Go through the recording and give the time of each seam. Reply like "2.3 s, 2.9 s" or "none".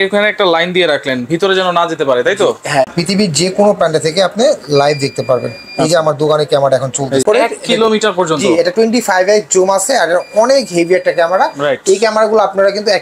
2.9 s, 7.2 s

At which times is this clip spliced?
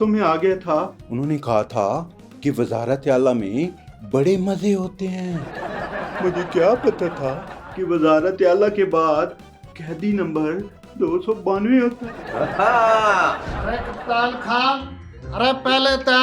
13.5 s

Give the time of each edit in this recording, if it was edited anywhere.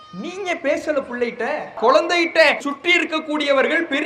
1.8 s, 2.6 s

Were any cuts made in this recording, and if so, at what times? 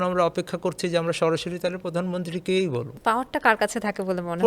2.9 s

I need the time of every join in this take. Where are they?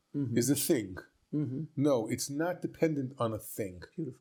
none

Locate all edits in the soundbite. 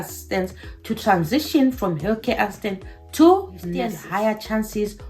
3.9 s

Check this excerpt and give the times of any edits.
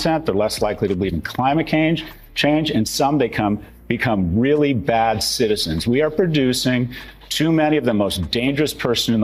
none

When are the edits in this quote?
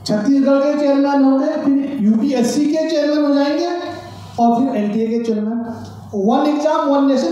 none

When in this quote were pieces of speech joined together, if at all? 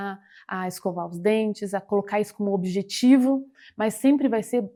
none

